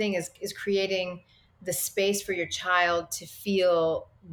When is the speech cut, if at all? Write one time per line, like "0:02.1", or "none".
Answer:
none